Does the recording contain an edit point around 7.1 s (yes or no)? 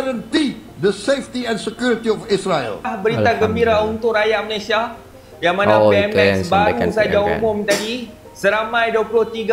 no